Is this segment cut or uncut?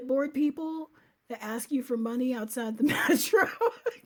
uncut